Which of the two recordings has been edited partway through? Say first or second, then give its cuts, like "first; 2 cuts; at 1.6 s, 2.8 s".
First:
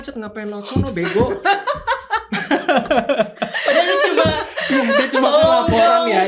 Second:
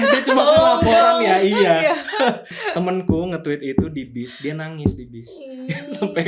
second; 1 cut; at 2.5 s